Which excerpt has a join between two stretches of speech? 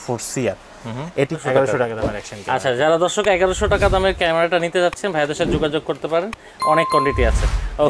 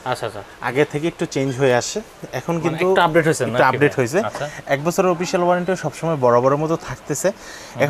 first; 1 cut; at 1.4 s

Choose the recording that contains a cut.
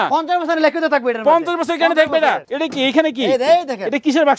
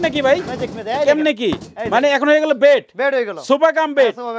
first; 1 cut; at 2.5 s

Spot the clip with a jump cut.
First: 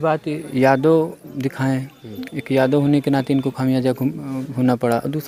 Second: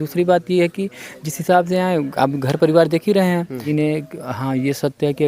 second; 1 cut; at 3.7 s

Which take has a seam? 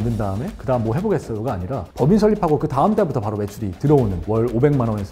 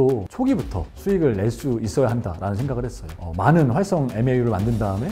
first; 2 cuts; at 1.9 s, 4.2 s

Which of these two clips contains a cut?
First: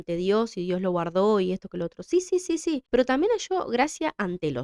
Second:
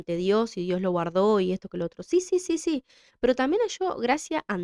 first; 1 cut; at 2.8 s

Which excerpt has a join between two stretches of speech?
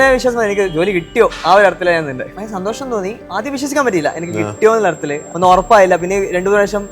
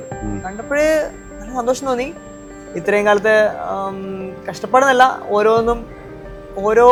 first; 2 cuts; at 2.8 s, 5.2 s

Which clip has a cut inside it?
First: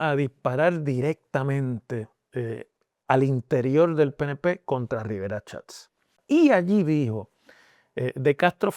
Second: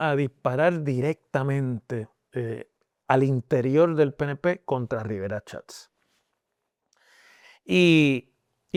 first; 1 cut; at 6.1 s

